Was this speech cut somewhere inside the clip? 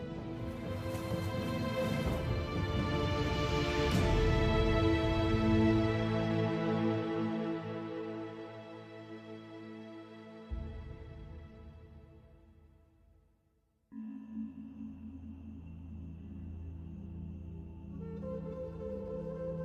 no; 0 cuts

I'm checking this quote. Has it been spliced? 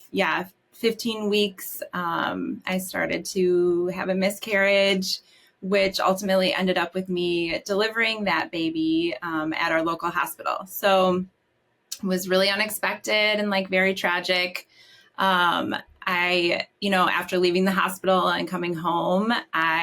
no; 0 cuts

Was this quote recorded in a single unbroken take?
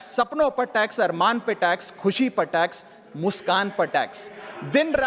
yes; 0 cuts

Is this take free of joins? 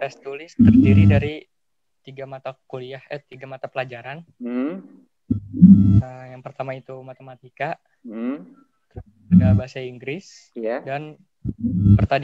yes; 0 cuts

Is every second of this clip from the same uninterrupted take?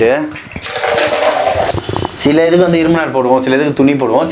no; 1 cut; at 1.7 s

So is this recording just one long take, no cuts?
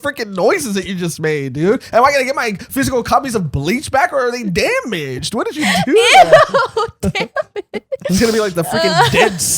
no; 1 cut; at 7.9 s

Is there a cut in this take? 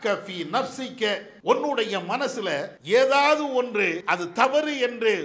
yes; 3 cuts; at 1.3 s, 2.7 s, 4.0 s

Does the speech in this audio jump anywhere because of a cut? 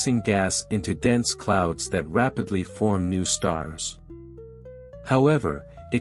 yes; 1 cut; at 3.0 s

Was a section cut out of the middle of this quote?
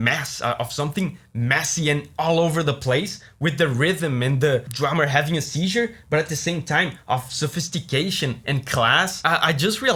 no; 0 cuts

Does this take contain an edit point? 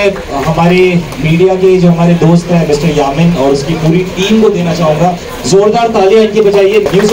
no; 0 cuts

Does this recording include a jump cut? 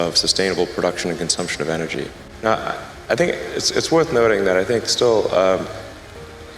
yes; 1 cut; at 2.2 s

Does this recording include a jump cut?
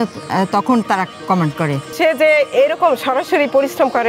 yes; 1 cut; at 1.8 s

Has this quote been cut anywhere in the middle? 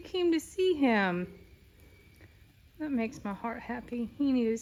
no; 0 cuts

